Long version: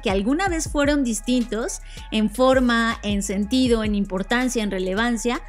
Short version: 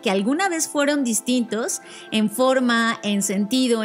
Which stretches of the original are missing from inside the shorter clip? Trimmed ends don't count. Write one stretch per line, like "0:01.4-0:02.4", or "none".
none